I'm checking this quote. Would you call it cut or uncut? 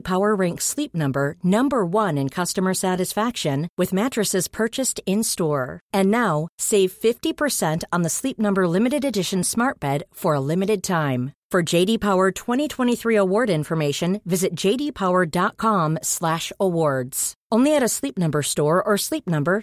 uncut